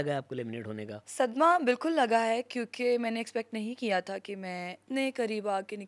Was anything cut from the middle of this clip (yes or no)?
yes